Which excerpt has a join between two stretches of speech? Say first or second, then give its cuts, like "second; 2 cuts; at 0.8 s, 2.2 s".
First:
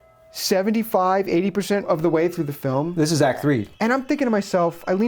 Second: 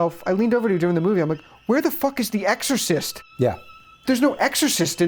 first; 2 cuts; at 1.9 s, 3.7 s